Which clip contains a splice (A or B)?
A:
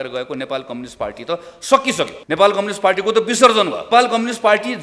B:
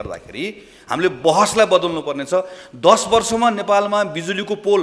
A